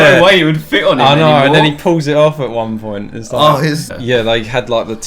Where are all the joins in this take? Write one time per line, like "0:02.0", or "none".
0:03.9